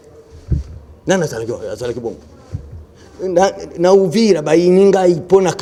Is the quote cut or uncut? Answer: uncut